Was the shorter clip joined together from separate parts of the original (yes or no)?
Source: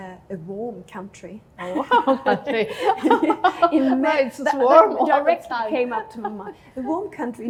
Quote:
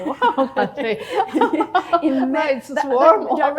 no